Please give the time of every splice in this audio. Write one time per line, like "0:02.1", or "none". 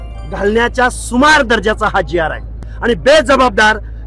0:02.7